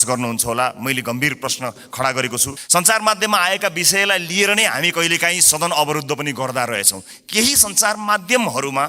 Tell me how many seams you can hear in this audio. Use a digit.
2